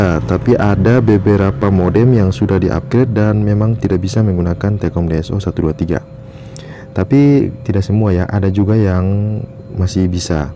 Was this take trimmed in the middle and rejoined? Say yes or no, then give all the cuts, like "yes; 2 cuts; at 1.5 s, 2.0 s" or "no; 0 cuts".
no; 0 cuts